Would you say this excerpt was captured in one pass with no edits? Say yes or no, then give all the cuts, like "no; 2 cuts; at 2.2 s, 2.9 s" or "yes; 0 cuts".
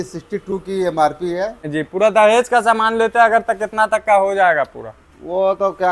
no; 1 cut; at 1.6 s